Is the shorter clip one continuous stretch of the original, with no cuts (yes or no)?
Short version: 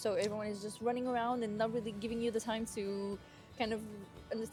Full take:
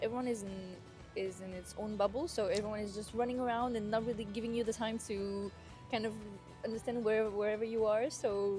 yes